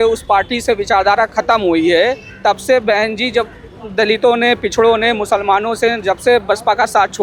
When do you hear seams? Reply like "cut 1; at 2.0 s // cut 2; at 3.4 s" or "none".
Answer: none